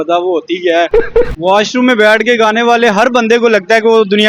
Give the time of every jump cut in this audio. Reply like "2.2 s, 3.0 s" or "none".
1.3 s

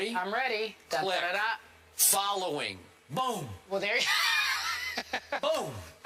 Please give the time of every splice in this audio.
none

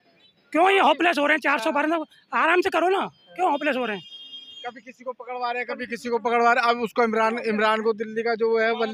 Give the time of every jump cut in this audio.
none

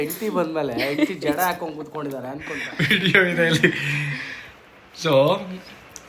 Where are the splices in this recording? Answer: 2.6 s

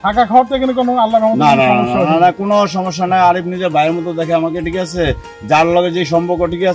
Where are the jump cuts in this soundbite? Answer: none

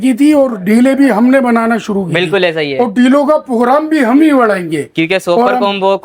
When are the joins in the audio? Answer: none

